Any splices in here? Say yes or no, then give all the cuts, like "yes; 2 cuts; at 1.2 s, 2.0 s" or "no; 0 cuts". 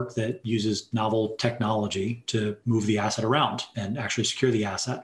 yes; 2 cuts; at 2.6 s, 3.7 s